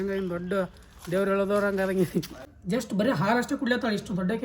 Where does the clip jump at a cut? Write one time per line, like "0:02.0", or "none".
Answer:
0:02.3